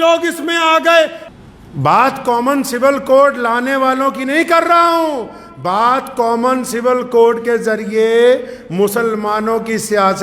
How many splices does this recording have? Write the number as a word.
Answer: one